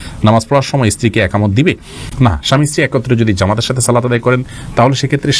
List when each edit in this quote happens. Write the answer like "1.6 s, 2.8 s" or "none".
none